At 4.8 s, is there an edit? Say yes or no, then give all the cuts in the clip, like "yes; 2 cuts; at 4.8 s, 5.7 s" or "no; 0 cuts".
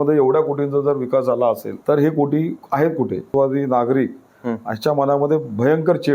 no; 2 cuts; at 1.7 s, 3.3 s